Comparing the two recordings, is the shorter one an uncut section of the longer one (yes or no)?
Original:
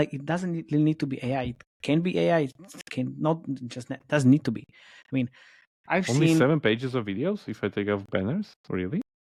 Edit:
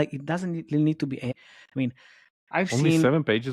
no